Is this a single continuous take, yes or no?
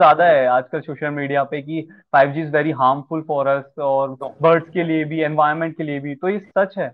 yes